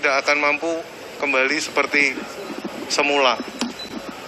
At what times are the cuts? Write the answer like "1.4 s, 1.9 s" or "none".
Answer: none

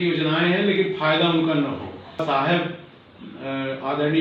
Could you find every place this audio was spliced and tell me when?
2.2 s

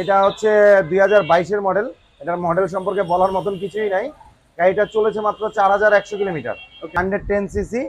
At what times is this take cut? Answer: 6.9 s

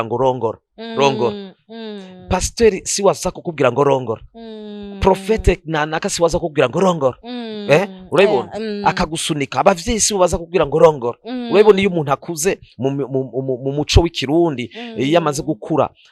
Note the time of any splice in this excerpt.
none

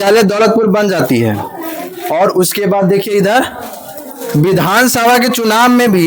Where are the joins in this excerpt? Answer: none

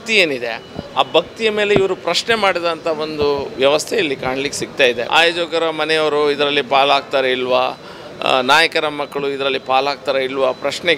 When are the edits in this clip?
5.0 s

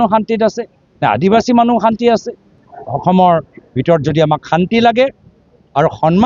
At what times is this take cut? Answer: 2.5 s

